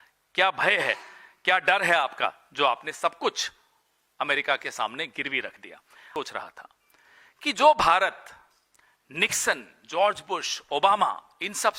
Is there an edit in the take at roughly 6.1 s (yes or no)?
yes